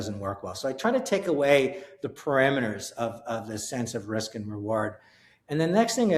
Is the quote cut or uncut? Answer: uncut